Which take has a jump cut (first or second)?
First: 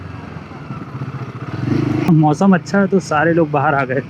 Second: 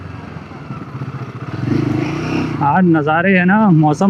first